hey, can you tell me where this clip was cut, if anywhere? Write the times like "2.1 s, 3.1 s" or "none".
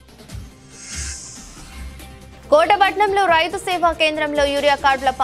1.2 s